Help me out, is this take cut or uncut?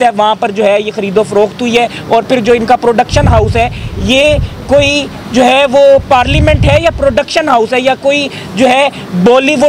uncut